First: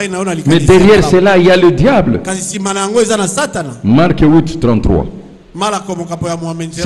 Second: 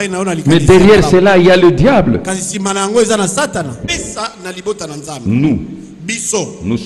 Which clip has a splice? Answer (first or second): second